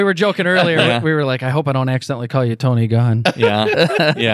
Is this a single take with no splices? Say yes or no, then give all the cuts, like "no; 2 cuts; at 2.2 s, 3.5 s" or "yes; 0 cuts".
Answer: yes; 0 cuts